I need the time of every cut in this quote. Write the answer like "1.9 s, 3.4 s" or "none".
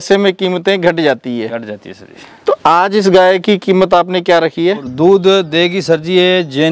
4.9 s